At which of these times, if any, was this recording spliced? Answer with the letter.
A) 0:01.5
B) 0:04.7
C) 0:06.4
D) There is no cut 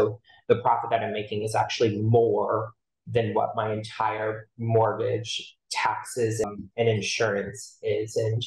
C